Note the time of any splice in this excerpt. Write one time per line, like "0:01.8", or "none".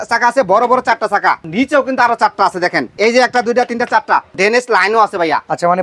0:01.5
0:02.9
0:04.3